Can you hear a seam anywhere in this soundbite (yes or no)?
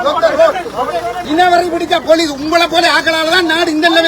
yes